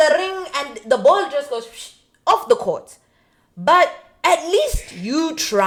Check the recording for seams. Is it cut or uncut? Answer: uncut